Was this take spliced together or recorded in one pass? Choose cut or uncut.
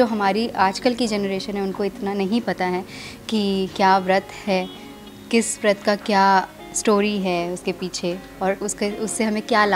uncut